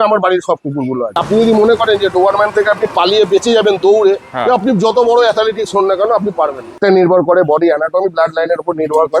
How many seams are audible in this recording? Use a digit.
2